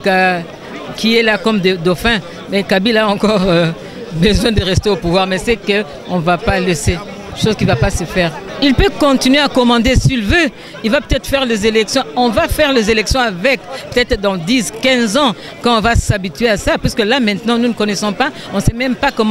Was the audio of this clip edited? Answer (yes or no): yes